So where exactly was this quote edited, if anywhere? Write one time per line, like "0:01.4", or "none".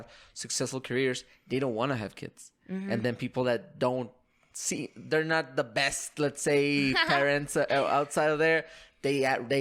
none